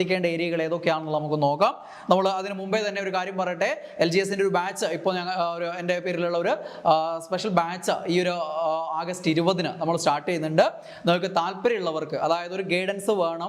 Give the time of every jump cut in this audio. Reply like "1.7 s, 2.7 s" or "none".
none